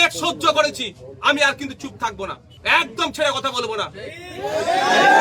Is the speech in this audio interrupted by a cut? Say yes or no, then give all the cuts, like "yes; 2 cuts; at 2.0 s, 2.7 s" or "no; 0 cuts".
yes; 1 cut; at 2.5 s